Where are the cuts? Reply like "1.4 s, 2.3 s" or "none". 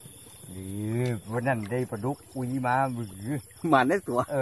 none